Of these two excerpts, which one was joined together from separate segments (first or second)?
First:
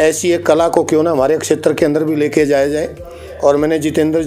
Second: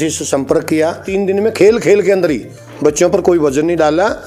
second